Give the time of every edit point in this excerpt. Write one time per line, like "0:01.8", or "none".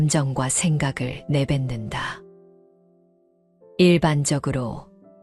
0:02.2
0:03.8